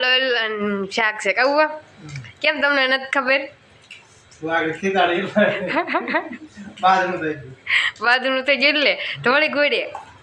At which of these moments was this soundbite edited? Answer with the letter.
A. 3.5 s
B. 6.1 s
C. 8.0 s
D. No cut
D